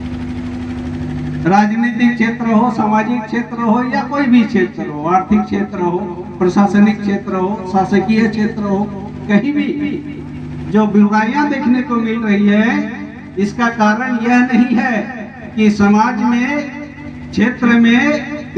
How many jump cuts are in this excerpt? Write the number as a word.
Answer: zero